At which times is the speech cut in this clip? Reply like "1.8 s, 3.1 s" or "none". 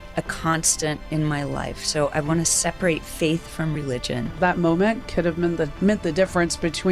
4.4 s